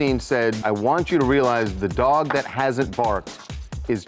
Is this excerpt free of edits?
yes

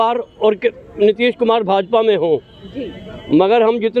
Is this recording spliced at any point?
no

